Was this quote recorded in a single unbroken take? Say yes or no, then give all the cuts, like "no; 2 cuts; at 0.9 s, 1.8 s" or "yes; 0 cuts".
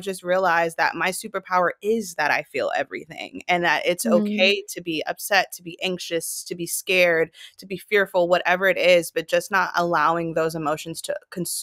yes; 0 cuts